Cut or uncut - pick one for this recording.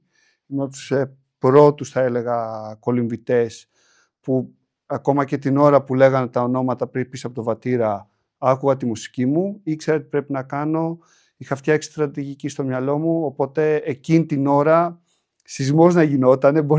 uncut